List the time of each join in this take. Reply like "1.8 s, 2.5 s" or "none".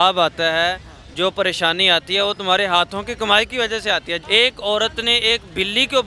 4.1 s